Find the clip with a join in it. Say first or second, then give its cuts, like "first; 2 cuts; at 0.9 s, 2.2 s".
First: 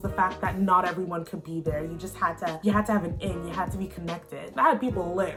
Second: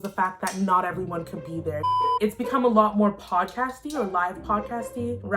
second; 1 cut; at 2.2 s